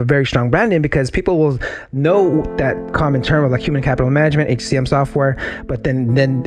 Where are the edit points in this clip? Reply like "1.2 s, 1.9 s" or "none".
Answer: 2.9 s